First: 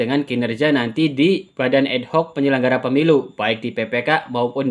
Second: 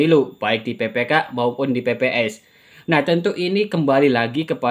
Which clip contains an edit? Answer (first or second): first